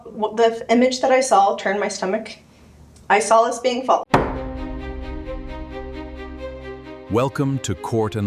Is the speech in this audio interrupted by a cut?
yes; 1 cut; at 4.0 s

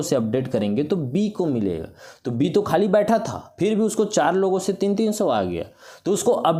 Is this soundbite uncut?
yes; 0 cuts

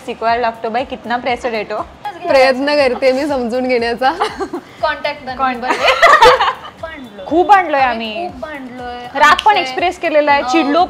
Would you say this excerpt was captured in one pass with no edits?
no; 2 cuts; at 2.2 s, 6.7 s

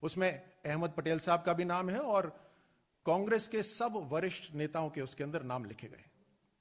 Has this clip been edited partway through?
yes; 2 cuts; at 4.0 s, 5.1 s

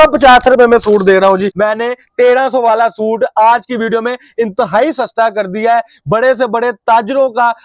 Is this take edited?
yes; 1 cut; at 1.5 s

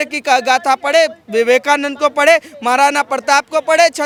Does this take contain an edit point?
no; 0 cuts

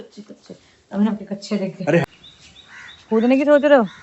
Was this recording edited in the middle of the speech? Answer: yes; 1 cut; at 2.0 s

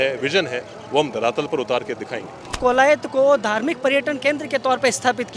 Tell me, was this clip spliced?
yes; 1 cut; at 2.5 s

